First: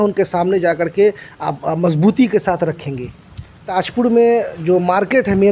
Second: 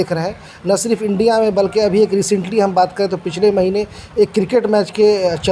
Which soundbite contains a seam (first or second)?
first